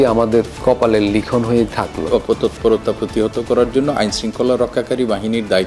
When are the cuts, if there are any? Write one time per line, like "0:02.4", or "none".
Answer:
0:02.1